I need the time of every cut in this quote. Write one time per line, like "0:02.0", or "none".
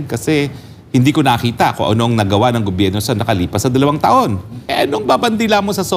0:04.6